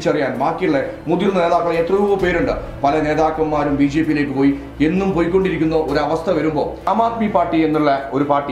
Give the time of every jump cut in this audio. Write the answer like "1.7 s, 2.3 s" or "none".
6.9 s